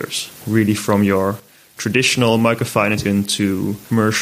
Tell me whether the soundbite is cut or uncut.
cut